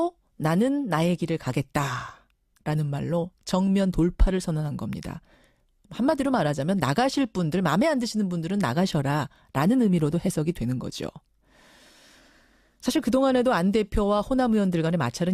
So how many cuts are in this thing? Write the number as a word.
one